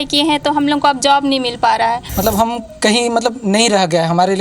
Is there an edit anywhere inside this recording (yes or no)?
yes